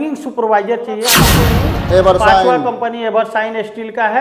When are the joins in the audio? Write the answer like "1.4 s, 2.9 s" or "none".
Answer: 1.2 s